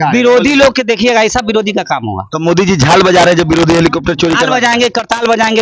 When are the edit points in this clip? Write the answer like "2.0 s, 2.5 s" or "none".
none